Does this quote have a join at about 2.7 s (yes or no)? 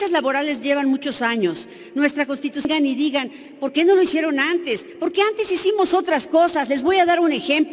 yes